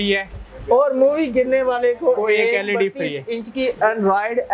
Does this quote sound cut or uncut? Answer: uncut